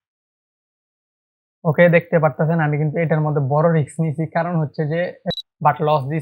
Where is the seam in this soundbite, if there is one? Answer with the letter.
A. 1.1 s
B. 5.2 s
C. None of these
B